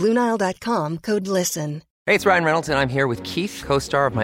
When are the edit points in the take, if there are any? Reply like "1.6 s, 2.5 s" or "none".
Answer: 1.9 s